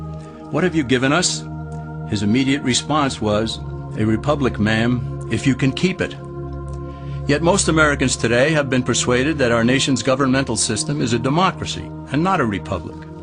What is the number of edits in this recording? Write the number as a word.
one